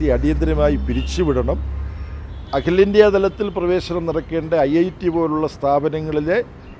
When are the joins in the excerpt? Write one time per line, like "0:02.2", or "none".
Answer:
none